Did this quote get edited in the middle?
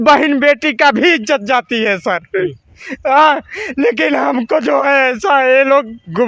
no; 0 cuts

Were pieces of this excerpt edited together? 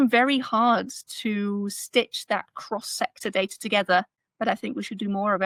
no; 0 cuts

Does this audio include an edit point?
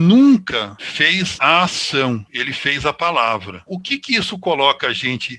yes; 1 cut; at 3.6 s

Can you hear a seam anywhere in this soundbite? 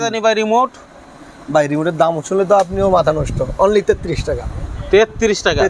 no; 0 cuts

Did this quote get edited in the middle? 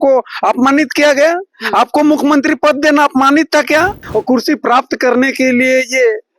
yes; 1 cut; at 4.0 s

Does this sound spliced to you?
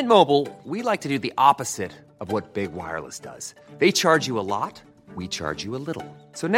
no; 0 cuts

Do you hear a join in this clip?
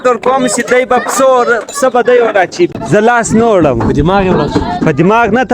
yes; 1 cut; at 2.7 s

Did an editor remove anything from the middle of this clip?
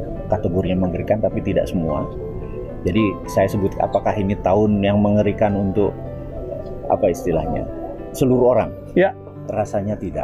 no; 0 cuts

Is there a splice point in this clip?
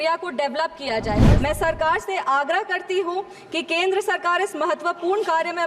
yes; 1 cut; at 1.2 s

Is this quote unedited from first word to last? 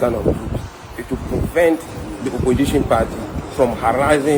yes; 0 cuts

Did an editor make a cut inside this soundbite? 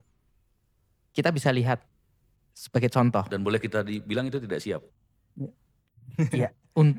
no; 0 cuts

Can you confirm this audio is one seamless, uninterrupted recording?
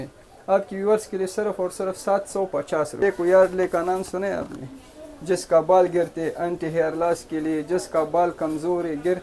no; 1 cut; at 3.0 s

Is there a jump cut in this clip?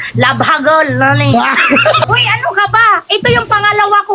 yes; 1 cut; at 2.0 s

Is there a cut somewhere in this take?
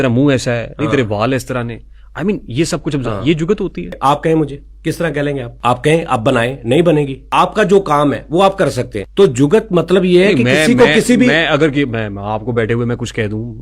yes; 4 cuts; at 3.9 s, 5.5 s, 7.2 s, 9.0 s

